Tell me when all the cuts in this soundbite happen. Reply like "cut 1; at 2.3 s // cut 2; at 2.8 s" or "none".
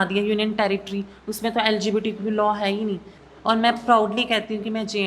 cut 1; at 3.1 s